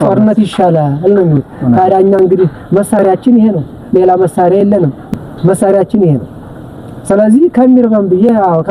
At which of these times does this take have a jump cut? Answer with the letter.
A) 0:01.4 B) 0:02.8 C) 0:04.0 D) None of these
D